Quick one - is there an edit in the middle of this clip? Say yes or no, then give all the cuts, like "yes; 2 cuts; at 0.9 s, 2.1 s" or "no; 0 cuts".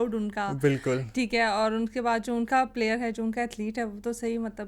no; 0 cuts